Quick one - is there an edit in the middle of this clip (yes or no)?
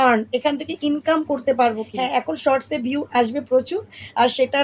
yes